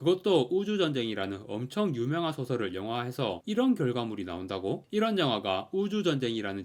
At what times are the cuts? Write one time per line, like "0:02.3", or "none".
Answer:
none